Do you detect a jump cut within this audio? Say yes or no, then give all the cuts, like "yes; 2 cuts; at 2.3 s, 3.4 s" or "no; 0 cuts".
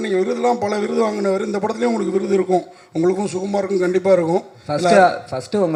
no; 0 cuts